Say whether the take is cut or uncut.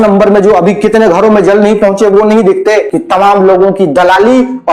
cut